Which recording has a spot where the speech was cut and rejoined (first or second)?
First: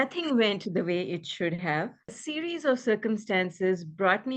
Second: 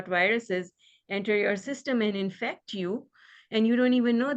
first